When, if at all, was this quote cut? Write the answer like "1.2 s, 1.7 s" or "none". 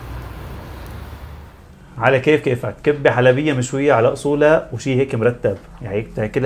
1.8 s